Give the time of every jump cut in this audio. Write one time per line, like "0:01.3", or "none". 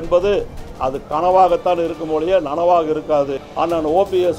0:03.4